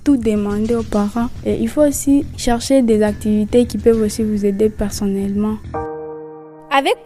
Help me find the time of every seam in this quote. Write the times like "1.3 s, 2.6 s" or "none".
5.7 s